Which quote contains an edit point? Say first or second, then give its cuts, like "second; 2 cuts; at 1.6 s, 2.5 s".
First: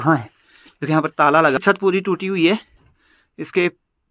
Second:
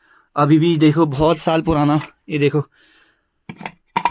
first; 1 cut; at 1.6 s